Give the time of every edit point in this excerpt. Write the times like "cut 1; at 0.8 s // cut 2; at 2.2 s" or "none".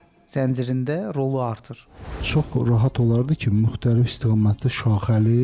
cut 1; at 2.2 s